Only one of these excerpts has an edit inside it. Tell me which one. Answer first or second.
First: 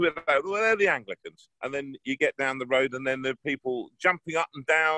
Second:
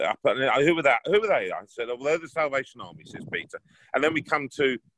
first